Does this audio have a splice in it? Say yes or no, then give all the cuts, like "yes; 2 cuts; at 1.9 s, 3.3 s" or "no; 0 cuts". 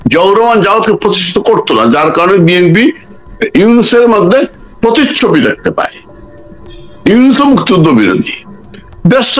no; 0 cuts